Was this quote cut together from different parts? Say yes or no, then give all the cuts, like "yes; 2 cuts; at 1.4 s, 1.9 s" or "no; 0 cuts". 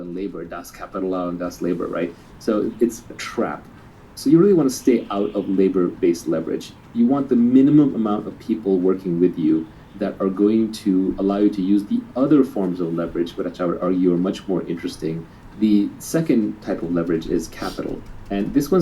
yes; 1 cut; at 3.1 s